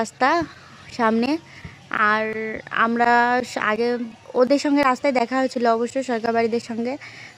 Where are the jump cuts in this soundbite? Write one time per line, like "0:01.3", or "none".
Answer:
none